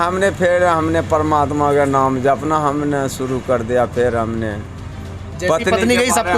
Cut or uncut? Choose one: uncut